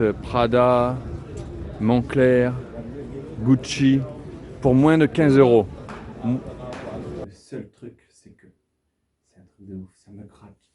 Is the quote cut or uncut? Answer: cut